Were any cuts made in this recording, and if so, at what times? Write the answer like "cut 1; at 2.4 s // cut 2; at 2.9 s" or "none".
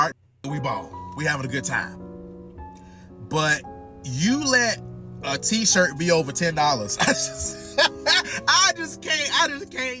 none